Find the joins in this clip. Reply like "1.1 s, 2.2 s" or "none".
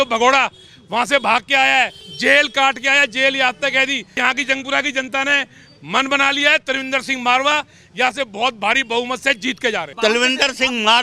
2.0 s, 4.1 s, 9.9 s